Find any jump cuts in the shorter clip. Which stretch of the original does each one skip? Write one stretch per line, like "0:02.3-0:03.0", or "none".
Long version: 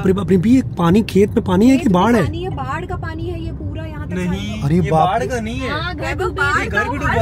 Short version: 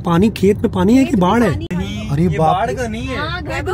0:02.4-0:04.2